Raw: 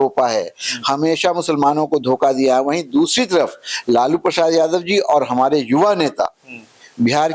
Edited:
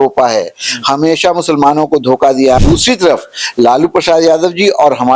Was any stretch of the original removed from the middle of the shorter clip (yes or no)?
yes